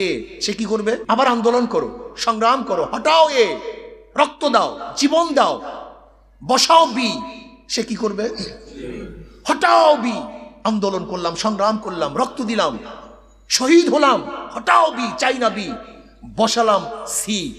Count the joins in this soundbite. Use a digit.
1